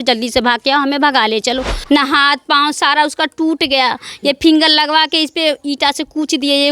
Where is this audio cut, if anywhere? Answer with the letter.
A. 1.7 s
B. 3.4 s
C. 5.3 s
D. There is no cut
A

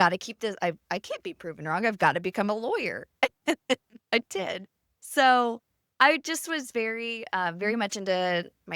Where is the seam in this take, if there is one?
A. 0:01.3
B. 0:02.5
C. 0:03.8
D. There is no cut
D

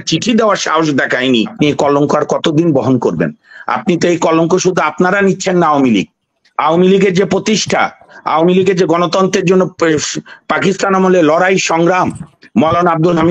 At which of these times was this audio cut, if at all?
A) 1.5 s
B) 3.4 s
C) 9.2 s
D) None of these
A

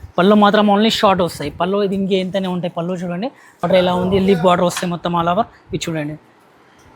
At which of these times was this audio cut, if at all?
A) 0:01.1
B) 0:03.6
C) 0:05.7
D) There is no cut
B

